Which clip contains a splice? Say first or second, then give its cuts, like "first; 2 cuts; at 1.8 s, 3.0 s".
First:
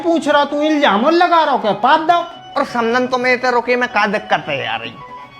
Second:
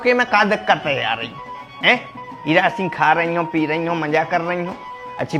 first; 1 cut; at 2.3 s